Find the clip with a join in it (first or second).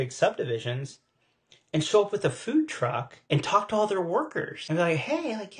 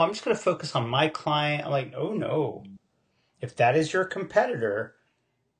first